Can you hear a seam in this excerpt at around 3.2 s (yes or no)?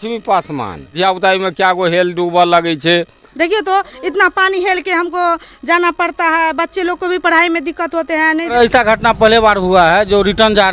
yes